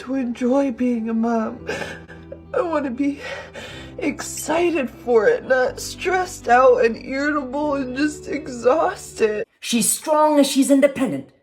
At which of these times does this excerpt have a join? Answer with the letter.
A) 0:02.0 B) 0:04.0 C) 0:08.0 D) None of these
A